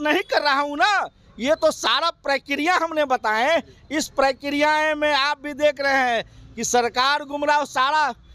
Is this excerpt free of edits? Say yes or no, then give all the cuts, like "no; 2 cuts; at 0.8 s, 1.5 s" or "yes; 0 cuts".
yes; 0 cuts